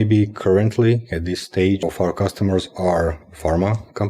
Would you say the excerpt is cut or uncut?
cut